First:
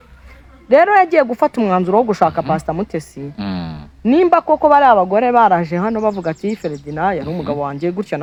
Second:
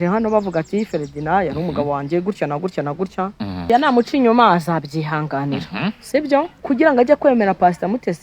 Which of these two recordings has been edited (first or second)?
second